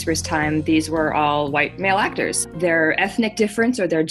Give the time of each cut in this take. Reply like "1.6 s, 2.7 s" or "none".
2.3 s